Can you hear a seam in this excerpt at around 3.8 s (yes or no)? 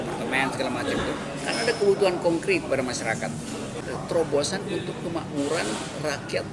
yes